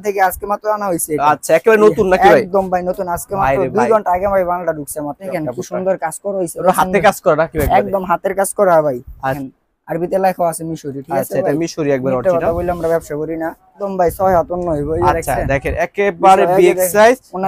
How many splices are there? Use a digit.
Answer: 3